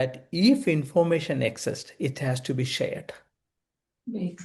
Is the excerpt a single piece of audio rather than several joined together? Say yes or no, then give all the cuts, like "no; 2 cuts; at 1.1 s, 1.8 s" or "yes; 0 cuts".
yes; 0 cuts